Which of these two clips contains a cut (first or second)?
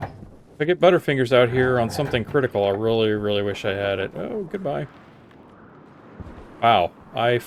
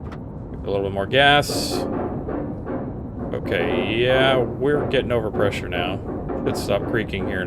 second